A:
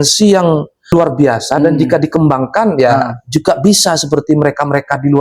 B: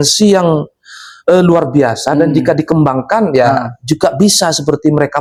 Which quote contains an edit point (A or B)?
A